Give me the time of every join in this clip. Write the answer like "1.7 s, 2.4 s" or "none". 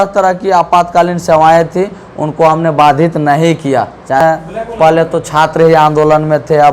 4.2 s